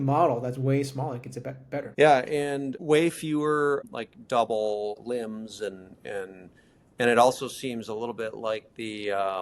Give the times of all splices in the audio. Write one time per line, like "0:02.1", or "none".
0:01.9
0:02.7
0:03.8
0:05.0